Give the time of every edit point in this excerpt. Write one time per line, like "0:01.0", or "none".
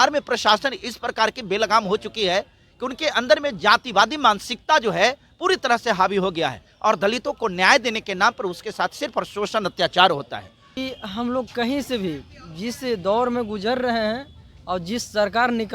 0:10.8